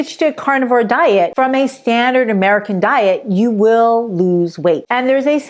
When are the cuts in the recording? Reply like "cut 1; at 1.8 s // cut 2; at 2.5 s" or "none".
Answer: cut 1; at 1.3 s